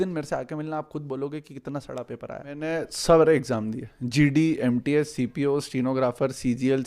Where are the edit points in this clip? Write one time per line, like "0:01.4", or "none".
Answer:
0:02.7